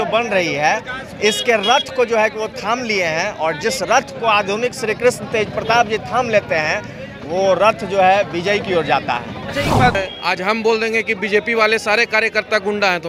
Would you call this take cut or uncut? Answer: cut